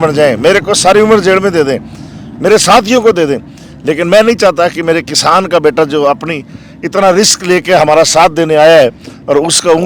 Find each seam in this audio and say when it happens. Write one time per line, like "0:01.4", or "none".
none